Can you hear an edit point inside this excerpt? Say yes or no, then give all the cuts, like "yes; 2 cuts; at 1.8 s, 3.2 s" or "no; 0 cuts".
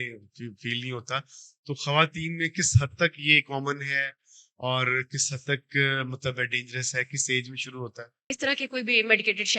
yes; 1 cut; at 8.4 s